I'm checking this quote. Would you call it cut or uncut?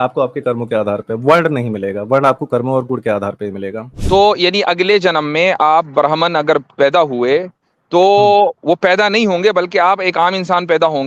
cut